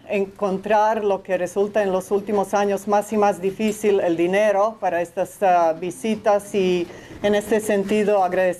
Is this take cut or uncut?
uncut